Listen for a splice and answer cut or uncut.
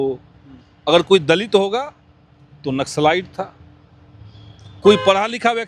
uncut